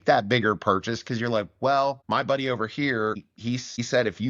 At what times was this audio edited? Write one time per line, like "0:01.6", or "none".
0:02.0
0:03.4